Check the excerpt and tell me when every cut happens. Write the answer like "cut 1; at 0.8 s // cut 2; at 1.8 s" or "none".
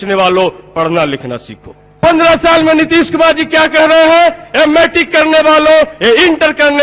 cut 1; at 1.8 s